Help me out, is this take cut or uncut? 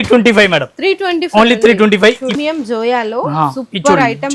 cut